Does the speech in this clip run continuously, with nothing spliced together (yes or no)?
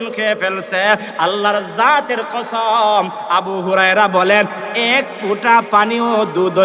yes